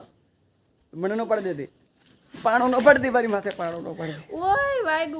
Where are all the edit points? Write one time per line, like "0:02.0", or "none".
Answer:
none